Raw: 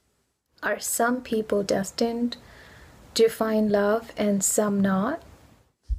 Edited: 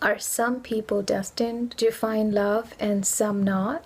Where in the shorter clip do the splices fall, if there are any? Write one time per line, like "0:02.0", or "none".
0:01.7

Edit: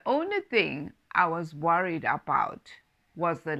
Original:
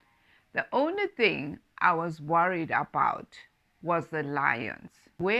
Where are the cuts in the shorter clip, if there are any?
none

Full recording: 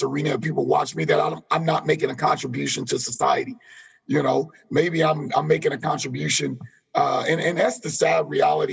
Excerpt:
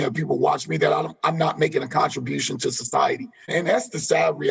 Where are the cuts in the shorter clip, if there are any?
0:03.5

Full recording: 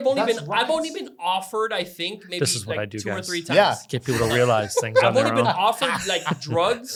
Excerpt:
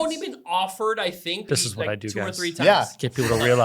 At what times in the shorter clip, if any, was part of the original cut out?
0:01.5

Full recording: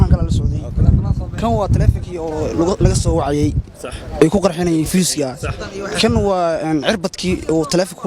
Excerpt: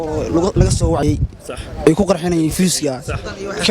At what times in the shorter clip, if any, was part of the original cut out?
0:01.0

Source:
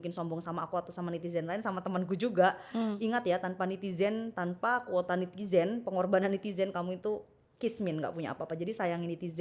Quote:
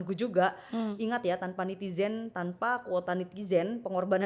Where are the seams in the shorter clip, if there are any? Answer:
none

